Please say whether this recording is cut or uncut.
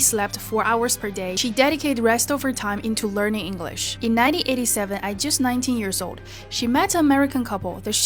uncut